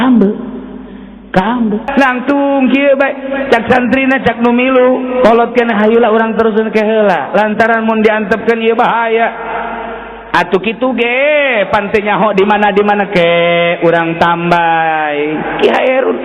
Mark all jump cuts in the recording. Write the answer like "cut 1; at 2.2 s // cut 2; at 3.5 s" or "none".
cut 1; at 1.9 s

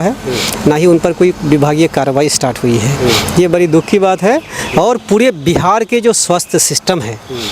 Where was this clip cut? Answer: none

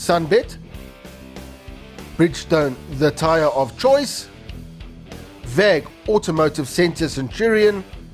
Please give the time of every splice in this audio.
none

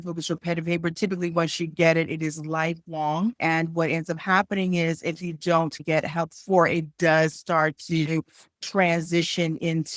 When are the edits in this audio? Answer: cut 1; at 3.4 s // cut 2; at 5.8 s

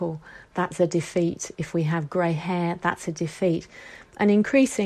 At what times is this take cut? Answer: none

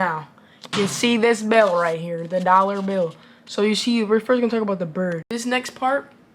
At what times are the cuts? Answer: cut 1; at 5.3 s

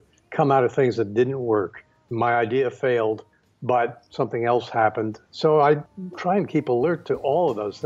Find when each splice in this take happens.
cut 1; at 2.1 s // cut 2; at 5.2 s // cut 3; at 5.8 s

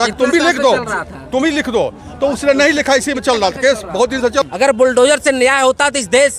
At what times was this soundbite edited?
cut 1; at 4.7 s

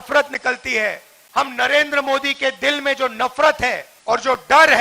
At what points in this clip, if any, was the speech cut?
cut 1; at 1.1 s // cut 2; at 3.9 s

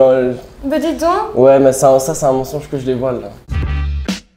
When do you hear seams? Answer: cut 1; at 3.4 s

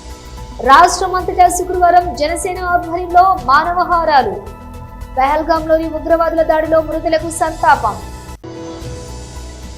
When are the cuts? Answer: none

